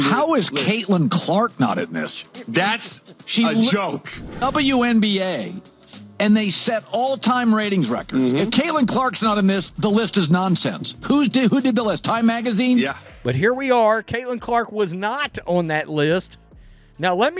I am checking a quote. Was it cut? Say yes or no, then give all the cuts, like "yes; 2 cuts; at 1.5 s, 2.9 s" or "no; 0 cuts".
yes; 2 cuts; at 4.3 s, 13.1 s